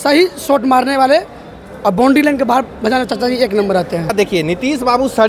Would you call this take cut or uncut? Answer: cut